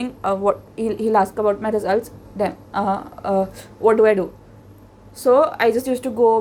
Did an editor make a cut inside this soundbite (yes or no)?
no